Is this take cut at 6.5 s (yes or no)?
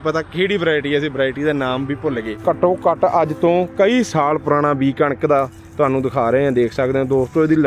no